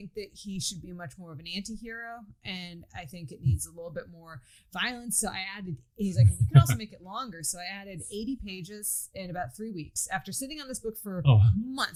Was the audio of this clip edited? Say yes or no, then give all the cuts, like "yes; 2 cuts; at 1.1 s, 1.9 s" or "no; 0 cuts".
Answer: no; 0 cuts